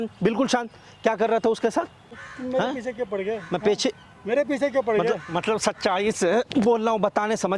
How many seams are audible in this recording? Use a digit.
1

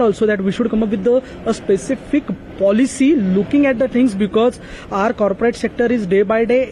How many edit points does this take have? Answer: 0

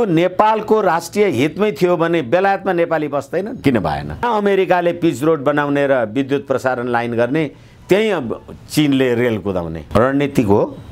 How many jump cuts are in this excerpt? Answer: 2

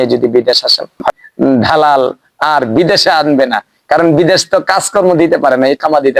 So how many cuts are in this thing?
1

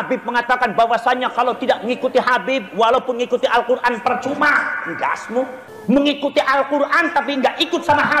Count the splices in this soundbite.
1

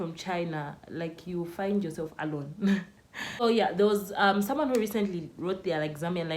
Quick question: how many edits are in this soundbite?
1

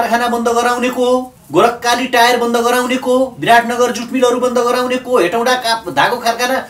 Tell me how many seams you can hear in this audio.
1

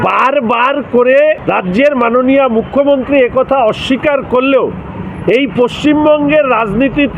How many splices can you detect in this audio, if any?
1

